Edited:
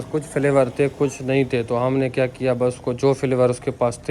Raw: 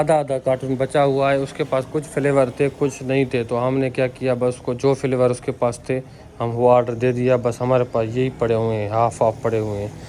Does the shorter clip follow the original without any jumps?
yes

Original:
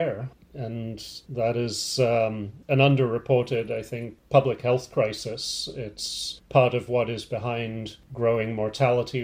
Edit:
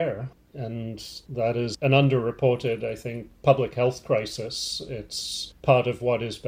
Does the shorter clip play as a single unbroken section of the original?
no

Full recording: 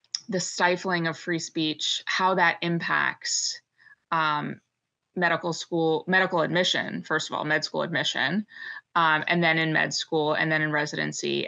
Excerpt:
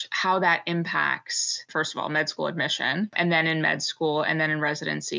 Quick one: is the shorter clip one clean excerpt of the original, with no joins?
no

